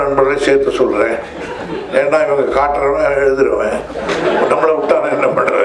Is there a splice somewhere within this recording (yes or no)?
no